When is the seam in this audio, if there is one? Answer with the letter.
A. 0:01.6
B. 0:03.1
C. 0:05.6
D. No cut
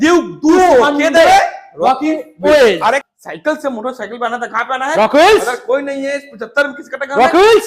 B